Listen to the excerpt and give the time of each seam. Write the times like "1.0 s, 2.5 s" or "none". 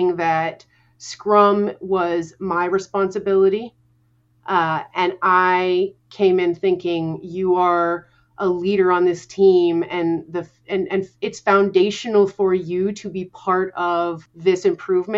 14.3 s